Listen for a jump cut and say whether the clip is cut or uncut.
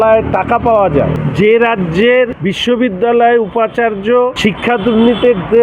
cut